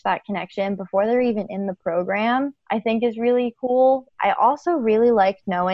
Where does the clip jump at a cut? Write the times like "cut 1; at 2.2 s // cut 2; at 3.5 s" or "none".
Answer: cut 1; at 2.6 s // cut 2; at 4.1 s